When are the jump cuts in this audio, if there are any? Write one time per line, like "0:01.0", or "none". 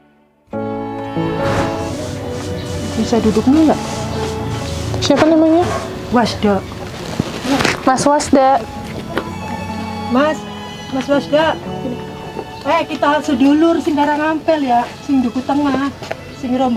none